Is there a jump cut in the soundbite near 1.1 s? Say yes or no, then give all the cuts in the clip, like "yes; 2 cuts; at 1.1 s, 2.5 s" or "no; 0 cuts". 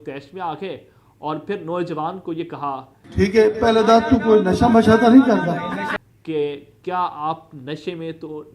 no; 2 cuts; at 3.0 s, 6.0 s